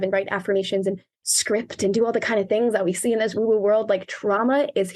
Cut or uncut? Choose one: cut